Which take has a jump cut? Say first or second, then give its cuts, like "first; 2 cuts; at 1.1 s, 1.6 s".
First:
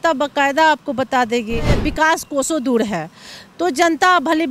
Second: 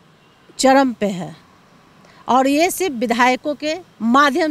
first; 1 cut; at 1.8 s